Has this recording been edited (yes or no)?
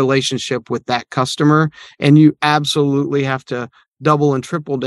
no